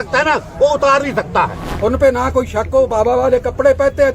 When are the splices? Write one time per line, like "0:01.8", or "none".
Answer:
0:01.6